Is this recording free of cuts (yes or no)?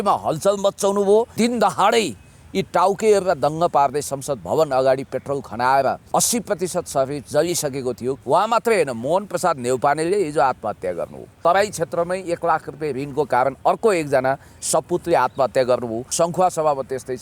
no